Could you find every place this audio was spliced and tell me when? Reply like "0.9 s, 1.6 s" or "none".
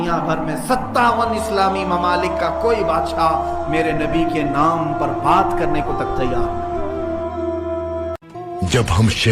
8.3 s